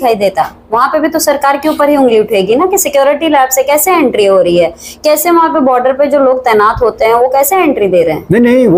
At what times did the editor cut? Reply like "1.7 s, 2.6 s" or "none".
none